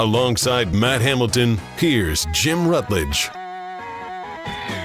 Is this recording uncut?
yes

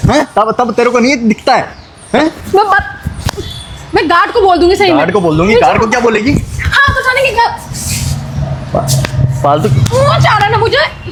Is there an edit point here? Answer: no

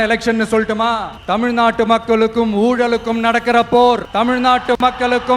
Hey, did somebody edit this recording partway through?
yes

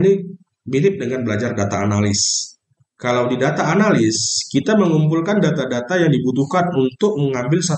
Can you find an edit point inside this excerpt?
no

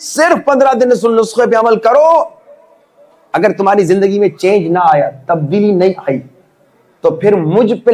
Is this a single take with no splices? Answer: yes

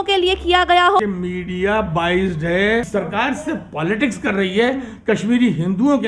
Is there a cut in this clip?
yes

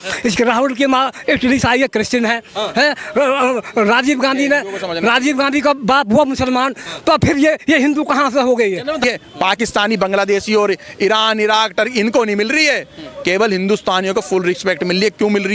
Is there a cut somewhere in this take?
yes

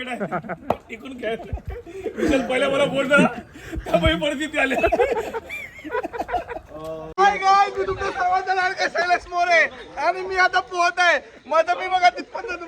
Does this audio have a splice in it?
yes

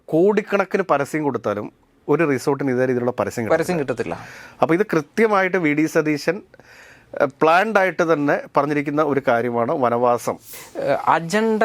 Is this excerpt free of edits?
no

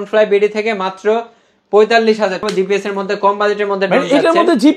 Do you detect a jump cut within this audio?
yes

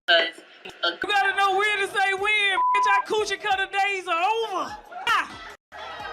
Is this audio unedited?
no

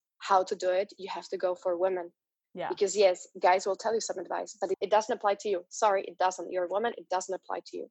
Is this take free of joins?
no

